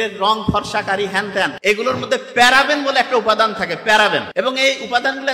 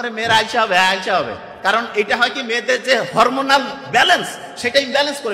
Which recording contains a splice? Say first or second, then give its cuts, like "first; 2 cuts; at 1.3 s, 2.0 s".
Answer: first; 2 cuts; at 1.5 s, 4.3 s